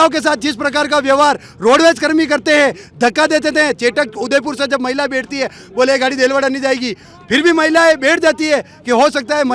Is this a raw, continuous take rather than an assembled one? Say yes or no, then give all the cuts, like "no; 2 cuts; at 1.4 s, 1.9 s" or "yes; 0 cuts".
yes; 0 cuts